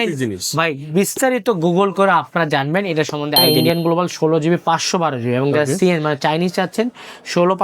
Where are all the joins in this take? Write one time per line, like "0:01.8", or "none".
0:03.5